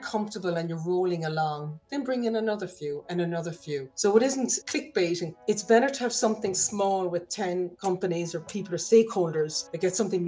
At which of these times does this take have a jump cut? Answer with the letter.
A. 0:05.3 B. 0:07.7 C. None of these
A